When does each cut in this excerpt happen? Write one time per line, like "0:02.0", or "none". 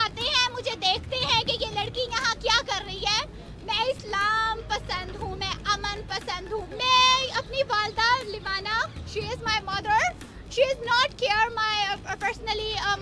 0:03.3
0:06.7

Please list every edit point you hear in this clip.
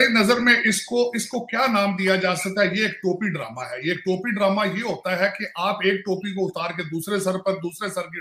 none

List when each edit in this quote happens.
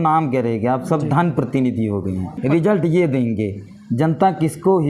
0:02.4

